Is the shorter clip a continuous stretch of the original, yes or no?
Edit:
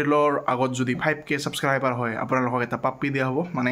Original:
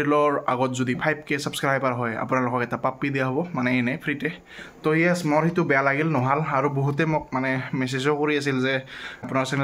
yes